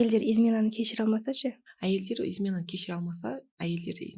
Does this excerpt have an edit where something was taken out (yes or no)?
yes